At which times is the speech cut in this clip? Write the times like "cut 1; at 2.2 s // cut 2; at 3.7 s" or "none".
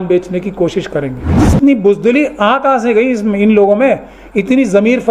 cut 1; at 1.4 s